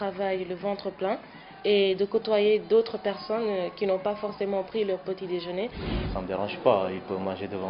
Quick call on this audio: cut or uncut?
cut